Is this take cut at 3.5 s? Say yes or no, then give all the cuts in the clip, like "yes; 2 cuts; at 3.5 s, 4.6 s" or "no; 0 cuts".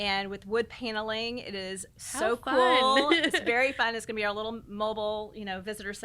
no; 0 cuts